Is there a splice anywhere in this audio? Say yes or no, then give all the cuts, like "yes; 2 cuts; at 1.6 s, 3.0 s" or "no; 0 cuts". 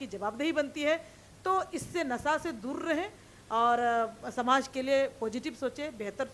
no; 0 cuts